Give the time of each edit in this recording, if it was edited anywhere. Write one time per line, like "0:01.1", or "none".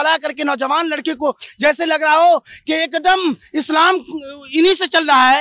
none